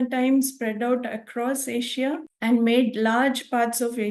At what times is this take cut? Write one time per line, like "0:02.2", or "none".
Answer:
none

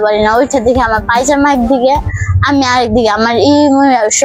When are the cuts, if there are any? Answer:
none

